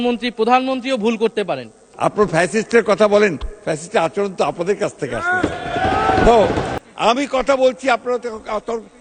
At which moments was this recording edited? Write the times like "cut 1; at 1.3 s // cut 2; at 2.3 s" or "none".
cut 1; at 1.8 s // cut 2; at 6.7 s